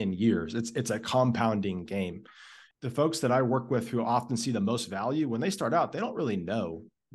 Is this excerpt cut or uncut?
cut